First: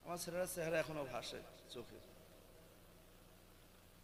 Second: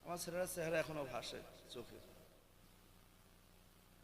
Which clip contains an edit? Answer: second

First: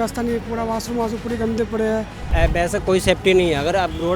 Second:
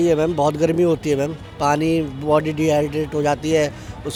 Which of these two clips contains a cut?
first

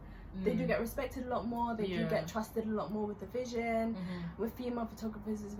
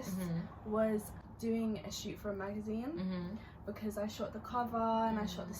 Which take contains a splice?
second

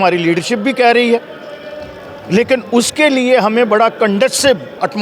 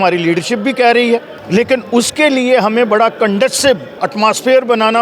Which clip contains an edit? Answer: second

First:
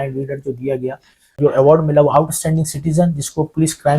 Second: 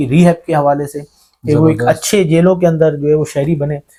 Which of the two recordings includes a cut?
first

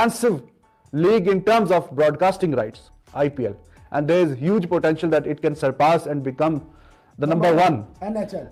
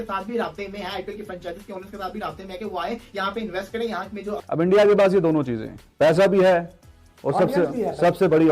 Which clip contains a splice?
second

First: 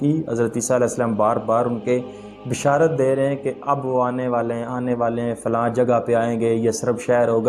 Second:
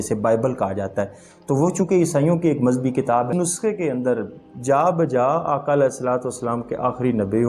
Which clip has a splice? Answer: second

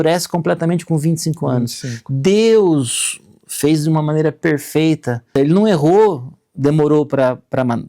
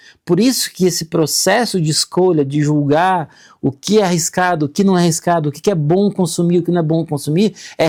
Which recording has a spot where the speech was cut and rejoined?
first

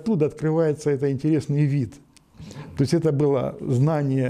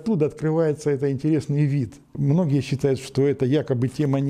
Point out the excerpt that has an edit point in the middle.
second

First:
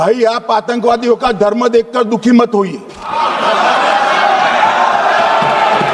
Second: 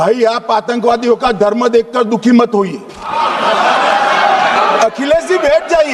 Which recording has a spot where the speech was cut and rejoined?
second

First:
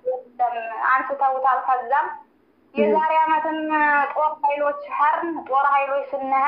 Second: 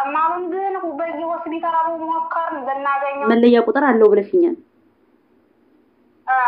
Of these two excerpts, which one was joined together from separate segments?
second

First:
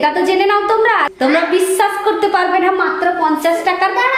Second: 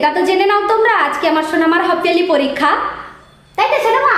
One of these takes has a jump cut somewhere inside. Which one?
first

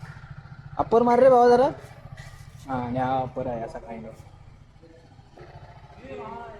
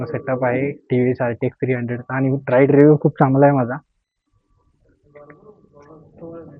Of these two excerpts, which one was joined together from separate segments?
first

